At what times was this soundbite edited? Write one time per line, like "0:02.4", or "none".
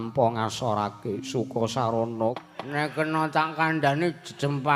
0:02.4